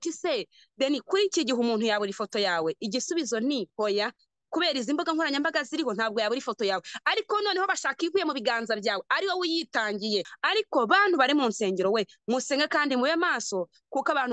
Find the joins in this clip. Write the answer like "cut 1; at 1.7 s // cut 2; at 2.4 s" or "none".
cut 1; at 10.4 s